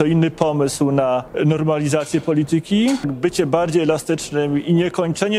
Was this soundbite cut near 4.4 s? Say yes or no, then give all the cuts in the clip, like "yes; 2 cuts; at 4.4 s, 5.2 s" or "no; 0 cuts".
no; 2 cuts; at 1.3 s, 3.0 s